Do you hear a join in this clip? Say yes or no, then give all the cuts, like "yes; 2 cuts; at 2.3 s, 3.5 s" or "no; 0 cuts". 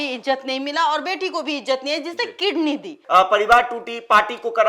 yes; 1 cut; at 3.0 s